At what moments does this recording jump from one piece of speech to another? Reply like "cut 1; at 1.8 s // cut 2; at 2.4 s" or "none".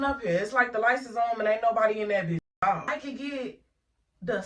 cut 1; at 2.9 s